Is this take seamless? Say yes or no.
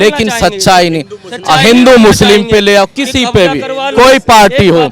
yes